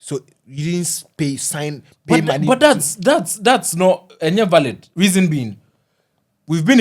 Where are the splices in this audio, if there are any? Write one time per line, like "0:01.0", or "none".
0:04.8